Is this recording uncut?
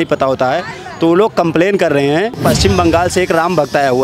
no; 1 cut; at 2.5 s

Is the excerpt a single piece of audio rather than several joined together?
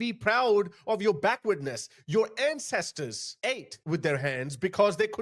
yes; 0 cuts

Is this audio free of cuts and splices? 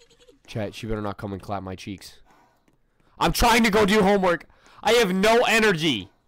yes; 0 cuts

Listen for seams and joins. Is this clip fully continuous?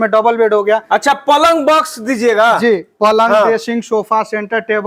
yes; 0 cuts

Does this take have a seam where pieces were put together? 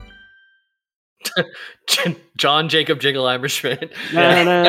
yes; 1 cut; at 1.2 s

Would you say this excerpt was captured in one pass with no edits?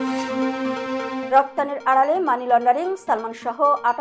no; 1 cut; at 1.2 s

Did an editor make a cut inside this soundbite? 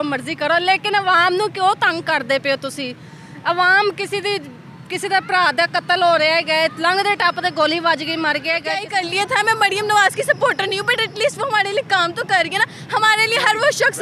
yes; 1 cut; at 8.8 s

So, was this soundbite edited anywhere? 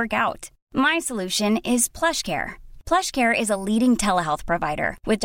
no; 0 cuts

